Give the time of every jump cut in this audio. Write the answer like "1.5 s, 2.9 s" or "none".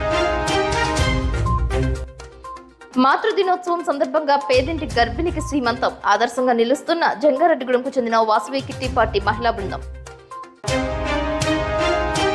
none